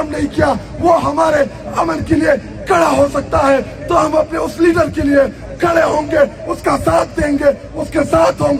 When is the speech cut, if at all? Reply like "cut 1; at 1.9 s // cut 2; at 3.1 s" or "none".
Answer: none

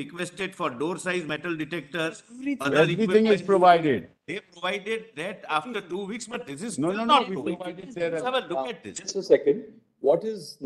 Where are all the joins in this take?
none

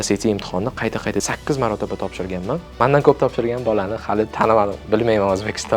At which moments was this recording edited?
cut 1; at 1.2 s // cut 2; at 2.7 s

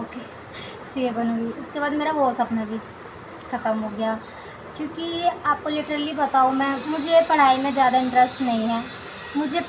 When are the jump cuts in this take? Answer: none

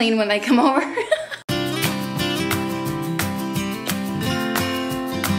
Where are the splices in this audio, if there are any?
cut 1; at 1.9 s

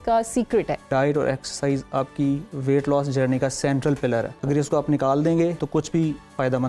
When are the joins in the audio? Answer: cut 1; at 0.9 s // cut 2; at 4.3 s // cut 3; at 5.6 s

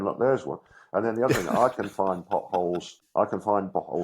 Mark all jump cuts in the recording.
cut 1; at 2.9 s

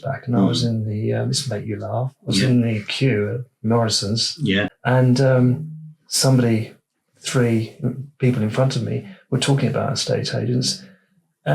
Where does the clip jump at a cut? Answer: cut 1; at 4.7 s

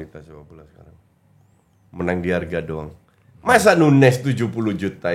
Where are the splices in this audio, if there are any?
none

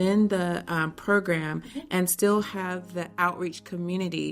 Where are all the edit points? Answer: none

